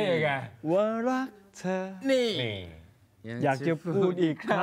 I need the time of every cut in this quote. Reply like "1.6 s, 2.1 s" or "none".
none

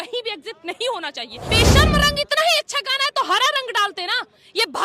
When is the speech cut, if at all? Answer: 1.5 s

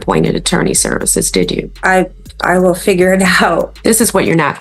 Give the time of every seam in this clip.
1.7 s, 3.7 s

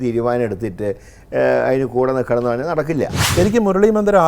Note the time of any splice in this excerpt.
3.3 s

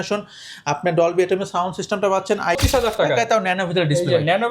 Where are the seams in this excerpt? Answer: 2.6 s

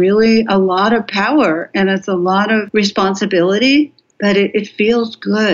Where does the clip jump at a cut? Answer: 2.7 s, 4.0 s

